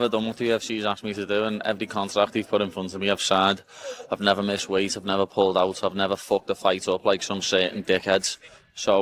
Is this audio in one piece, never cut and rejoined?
yes; 0 cuts

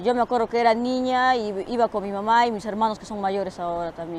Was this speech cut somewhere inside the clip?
yes; 1 cut; at 3.1 s

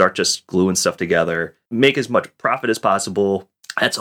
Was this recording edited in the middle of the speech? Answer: yes; 1 cut; at 1.6 s

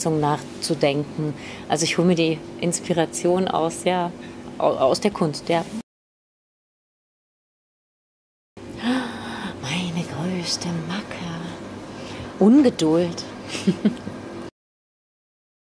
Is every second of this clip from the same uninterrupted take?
no; 1 cut; at 4.6 s

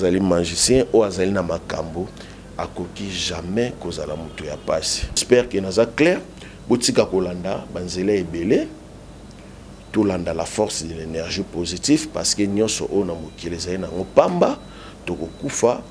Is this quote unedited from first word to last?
no; 1 cut; at 5.2 s

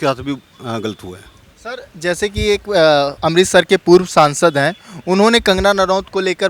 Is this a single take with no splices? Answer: yes; 0 cuts

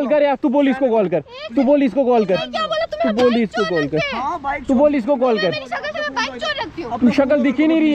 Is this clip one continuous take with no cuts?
yes; 0 cuts

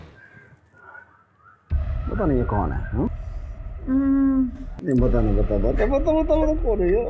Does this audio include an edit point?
no; 0 cuts

